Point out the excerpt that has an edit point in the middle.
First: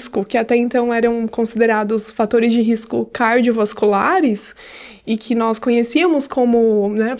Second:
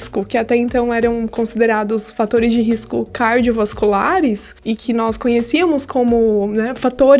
second; 1 cut; at 4.5 s

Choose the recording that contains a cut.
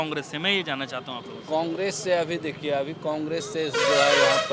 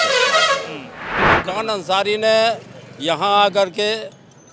second; 1 cut; at 1.2 s

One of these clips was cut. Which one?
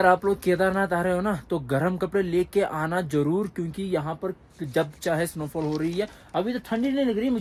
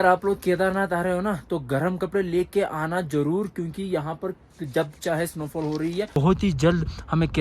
second; 1 cut; at 6.2 s

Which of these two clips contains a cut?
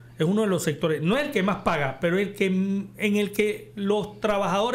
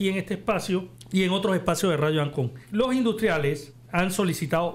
second; 3 cuts; at 1.0 s, 2.6 s, 3.7 s

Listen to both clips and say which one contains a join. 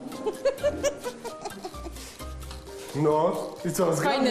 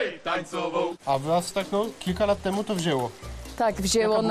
second; 1 cut; at 1.0 s

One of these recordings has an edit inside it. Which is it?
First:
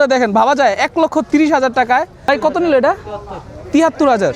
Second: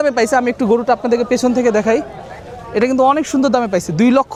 first; 1 cut; at 2.2 s

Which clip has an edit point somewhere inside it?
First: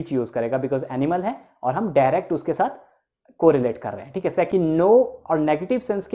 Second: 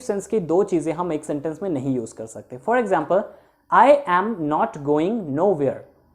first; 1 cut; at 4.5 s

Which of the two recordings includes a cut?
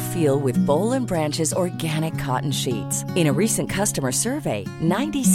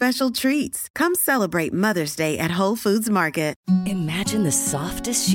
second; 1 cut; at 3.6 s

